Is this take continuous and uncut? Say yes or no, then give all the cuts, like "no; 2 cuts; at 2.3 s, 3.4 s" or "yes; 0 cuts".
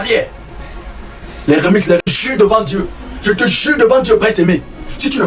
no; 1 cut; at 2.0 s